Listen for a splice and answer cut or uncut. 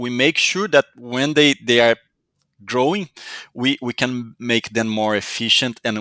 uncut